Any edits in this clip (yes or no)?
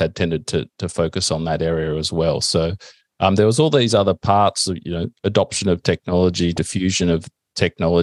no